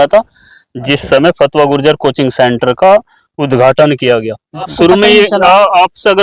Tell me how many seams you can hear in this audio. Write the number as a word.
one